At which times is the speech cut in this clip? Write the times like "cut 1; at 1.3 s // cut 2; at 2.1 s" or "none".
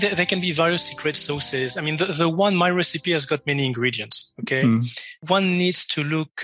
cut 1; at 5.2 s